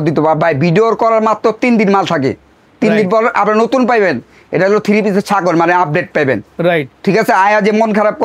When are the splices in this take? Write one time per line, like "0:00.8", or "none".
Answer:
none